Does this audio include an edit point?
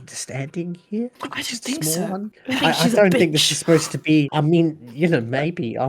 yes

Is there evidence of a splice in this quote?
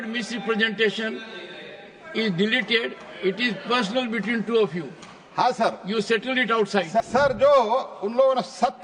yes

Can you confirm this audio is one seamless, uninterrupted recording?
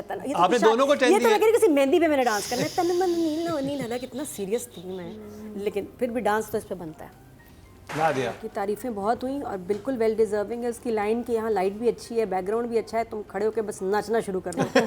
yes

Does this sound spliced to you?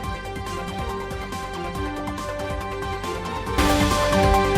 yes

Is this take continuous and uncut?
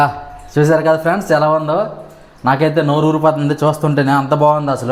yes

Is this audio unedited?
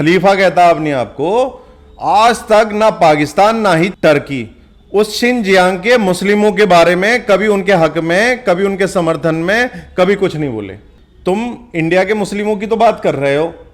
yes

